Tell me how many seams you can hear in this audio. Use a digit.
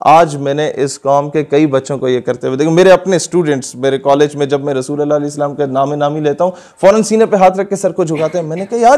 0